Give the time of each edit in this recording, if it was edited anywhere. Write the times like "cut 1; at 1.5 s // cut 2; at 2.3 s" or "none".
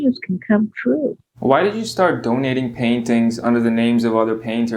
cut 1; at 1.3 s